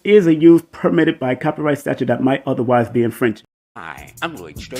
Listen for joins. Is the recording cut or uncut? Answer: cut